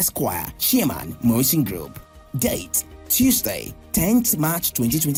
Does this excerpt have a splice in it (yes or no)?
no